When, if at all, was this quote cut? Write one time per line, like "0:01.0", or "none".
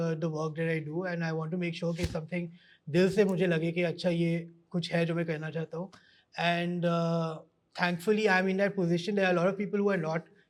none